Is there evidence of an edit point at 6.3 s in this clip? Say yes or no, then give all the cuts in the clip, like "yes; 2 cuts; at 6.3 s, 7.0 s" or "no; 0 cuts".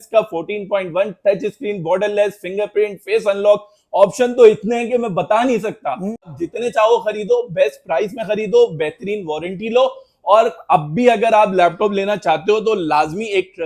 yes; 1 cut; at 6.3 s